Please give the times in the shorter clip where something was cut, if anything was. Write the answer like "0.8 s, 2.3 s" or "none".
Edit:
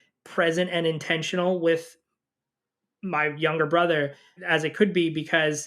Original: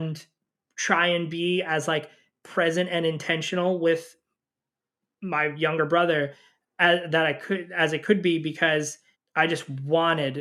4.4 s